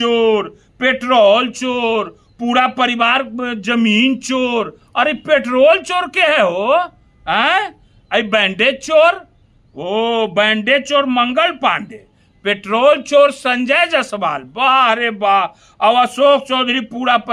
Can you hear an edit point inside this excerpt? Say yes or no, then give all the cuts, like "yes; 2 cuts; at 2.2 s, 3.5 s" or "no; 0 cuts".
no; 0 cuts